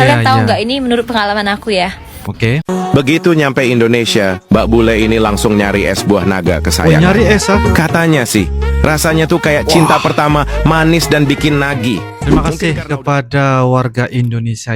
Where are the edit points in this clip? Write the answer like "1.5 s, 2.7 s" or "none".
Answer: 2.6 s, 12.4 s